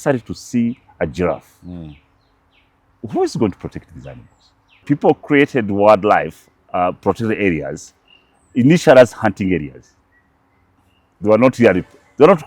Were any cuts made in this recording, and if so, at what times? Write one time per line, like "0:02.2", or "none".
0:04.8